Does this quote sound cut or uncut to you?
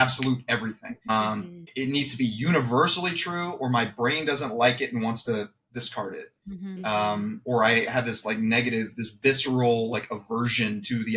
uncut